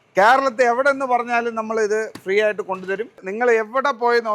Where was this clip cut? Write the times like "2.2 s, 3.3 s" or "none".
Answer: 3.2 s